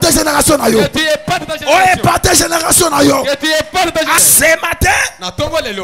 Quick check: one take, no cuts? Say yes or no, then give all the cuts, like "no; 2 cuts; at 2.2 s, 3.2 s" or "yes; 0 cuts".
no; 1 cut; at 4.2 s